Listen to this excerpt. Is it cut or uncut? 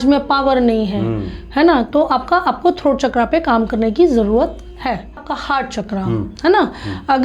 cut